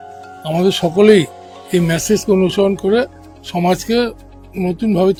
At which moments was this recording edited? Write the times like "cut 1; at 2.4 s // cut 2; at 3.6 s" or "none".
none